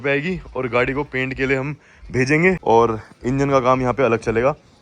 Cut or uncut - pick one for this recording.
cut